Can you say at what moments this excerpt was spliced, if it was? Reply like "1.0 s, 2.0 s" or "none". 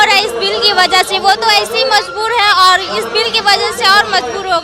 none